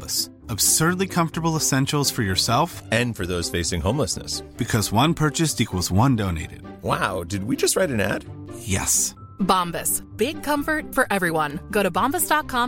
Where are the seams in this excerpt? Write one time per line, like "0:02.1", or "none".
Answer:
none

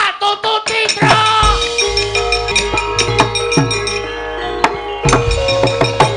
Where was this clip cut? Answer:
0:02.5

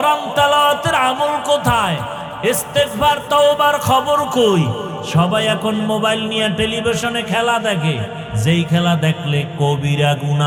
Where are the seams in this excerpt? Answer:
none

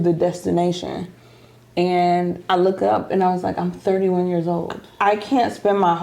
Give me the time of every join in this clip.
0:04.8

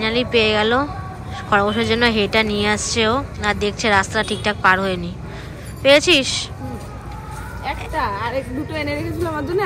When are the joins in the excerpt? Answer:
none

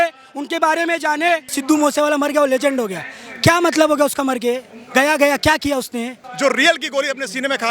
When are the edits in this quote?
0:01.5
0:06.3

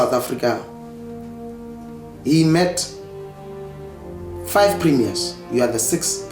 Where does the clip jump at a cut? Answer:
none

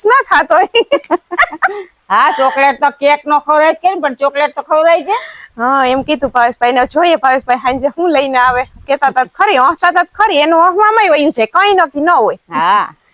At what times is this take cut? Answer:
none

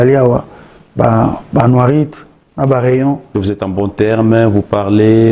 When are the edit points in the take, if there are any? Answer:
0:03.3

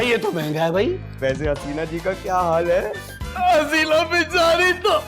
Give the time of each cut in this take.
0:01.1

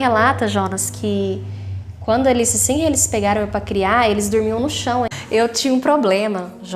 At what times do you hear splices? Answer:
0:05.1

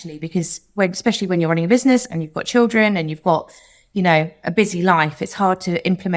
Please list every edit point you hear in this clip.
none

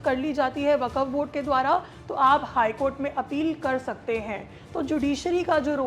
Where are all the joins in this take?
none

